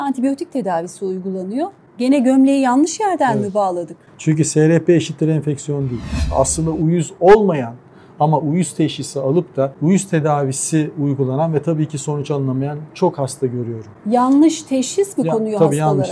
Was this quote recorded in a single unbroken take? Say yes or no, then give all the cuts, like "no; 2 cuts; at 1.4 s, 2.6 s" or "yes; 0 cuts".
no; 3 cuts; at 1.8 s, 6.3 s, 9.8 s